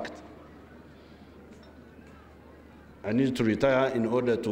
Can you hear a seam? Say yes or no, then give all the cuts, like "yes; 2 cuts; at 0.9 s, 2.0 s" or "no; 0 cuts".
no; 0 cuts